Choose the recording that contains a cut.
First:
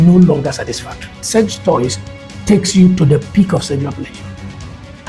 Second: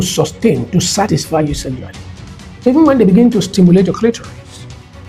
first; 1 cut; at 1.2 s

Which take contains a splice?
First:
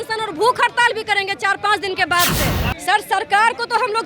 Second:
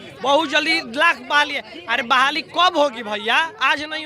first; 1 cut; at 2.7 s

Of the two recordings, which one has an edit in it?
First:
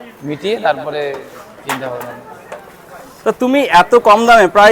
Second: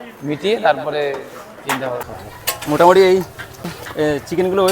second; 2 cuts; at 2.1 s, 3.7 s

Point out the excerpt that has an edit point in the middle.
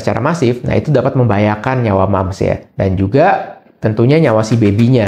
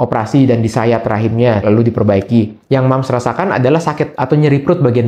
second; 3 cuts; at 1.6 s, 2.6 s, 4.2 s

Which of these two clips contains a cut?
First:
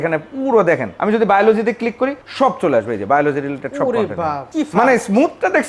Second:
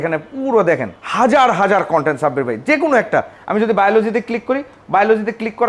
first; 3 cuts; at 0.9 s, 2.2 s, 4.5 s

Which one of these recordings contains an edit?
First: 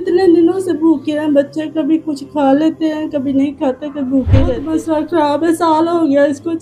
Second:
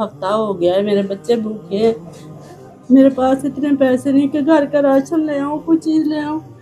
first; 1 cut; at 4.6 s

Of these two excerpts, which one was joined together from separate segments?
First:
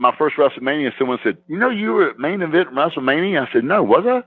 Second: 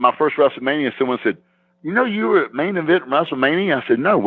first; 1 cut; at 1.5 s

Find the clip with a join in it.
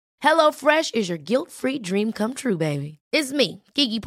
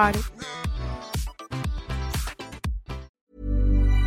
second; 1 cut; at 3.1 s

